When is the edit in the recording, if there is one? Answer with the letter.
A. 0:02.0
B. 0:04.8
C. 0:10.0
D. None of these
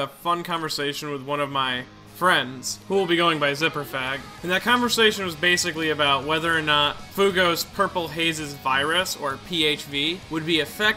D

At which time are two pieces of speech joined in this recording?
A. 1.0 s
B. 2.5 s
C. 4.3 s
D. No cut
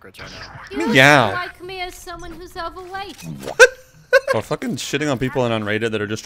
C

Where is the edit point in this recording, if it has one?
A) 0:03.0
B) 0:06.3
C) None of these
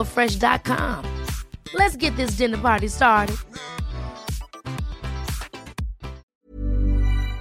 B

